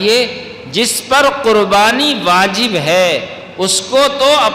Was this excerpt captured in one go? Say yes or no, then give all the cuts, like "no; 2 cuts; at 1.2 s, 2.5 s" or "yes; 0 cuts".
yes; 0 cuts